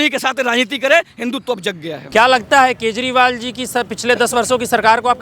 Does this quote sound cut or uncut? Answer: cut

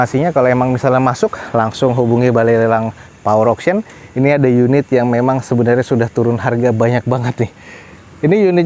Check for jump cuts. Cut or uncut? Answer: uncut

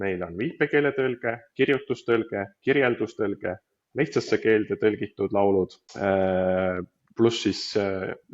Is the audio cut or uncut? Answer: cut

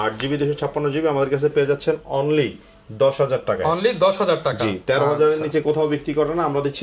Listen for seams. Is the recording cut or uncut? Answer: uncut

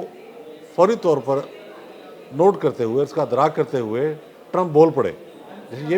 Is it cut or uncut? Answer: uncut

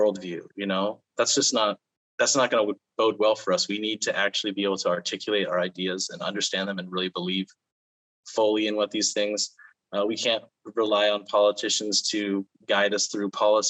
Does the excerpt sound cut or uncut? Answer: cut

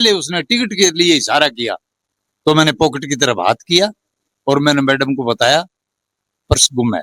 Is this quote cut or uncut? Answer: uncut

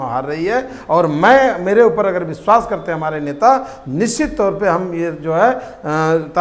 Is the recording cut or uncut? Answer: uncut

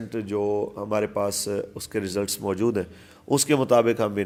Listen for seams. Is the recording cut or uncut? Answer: uncut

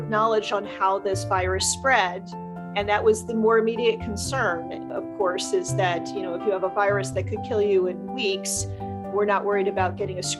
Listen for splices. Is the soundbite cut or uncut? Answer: uncut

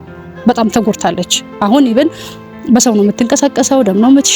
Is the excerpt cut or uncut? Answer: uncut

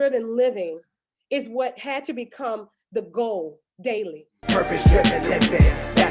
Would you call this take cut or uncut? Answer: cut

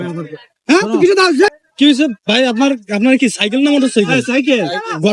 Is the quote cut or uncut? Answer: cut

